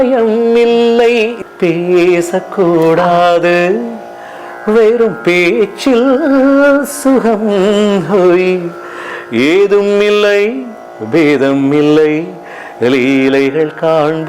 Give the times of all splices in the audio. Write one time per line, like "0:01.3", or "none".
0:01.4